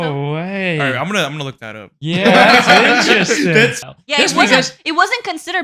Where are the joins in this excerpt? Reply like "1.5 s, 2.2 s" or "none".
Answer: 3.9 s